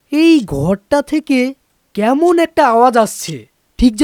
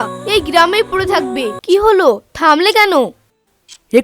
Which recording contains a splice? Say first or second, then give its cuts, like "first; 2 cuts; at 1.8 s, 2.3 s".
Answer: second; 1 cut; at 1.6 s